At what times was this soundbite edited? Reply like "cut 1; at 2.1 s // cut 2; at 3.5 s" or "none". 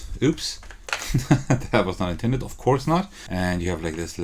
cut 1; at 3.2 s